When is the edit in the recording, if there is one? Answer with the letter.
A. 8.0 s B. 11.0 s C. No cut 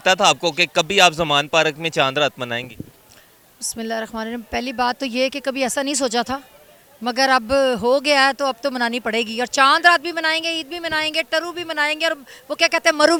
C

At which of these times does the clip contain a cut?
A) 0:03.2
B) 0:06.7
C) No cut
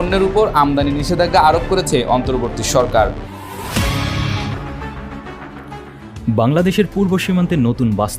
A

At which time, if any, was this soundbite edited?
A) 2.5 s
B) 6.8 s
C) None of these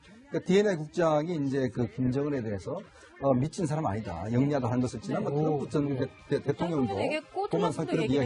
C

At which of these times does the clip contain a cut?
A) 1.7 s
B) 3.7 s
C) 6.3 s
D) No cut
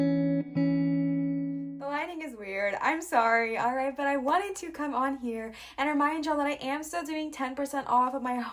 A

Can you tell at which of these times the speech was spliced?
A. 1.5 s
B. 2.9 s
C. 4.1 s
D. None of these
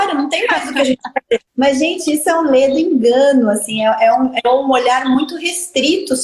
A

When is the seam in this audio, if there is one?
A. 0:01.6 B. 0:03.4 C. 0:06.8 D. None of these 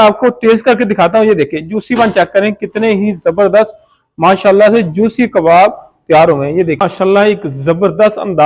C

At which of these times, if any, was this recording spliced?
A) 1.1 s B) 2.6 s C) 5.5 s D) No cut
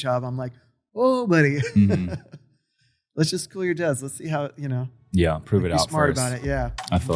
D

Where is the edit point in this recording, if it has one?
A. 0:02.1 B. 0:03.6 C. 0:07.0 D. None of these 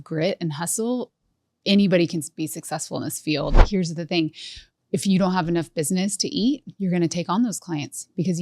B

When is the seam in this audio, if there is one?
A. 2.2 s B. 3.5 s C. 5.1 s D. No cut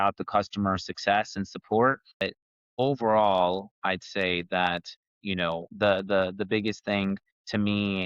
A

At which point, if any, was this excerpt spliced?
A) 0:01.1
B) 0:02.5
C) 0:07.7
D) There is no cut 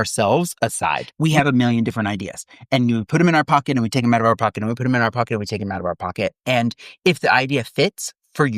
A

